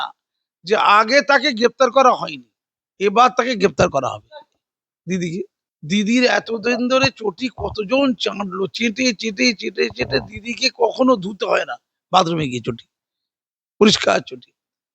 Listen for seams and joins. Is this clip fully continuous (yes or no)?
no